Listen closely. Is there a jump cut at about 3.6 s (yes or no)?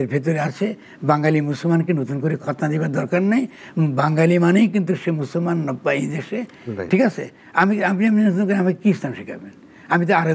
no